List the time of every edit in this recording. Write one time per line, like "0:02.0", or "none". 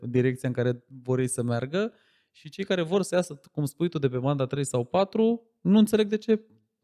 none